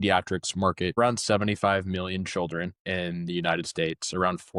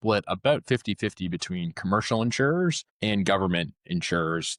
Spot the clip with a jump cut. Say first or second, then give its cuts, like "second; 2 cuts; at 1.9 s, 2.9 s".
first; 1 cut; at 1.0 s